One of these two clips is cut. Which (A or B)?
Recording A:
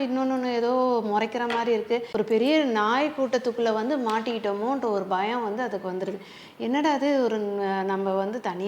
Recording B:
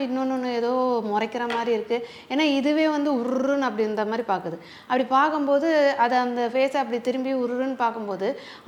A